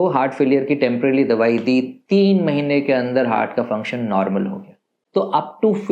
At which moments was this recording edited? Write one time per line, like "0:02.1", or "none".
0:04.9